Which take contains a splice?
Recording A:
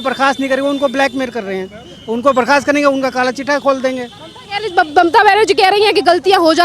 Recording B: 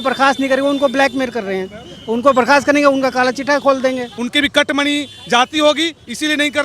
B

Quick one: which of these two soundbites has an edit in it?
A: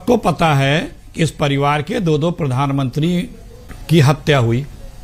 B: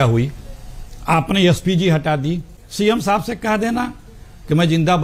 B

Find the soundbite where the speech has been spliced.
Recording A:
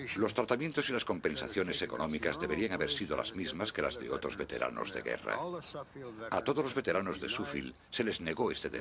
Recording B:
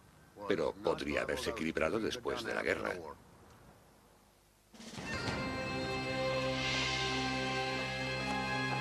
A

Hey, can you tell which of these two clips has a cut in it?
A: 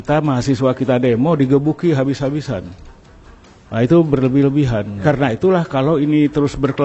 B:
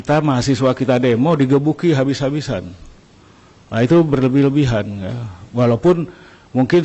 A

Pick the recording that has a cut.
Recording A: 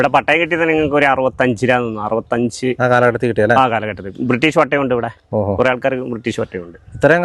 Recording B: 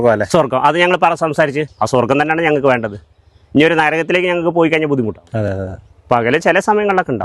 B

